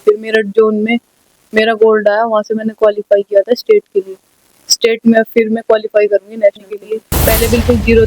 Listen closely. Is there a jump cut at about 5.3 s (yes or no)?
no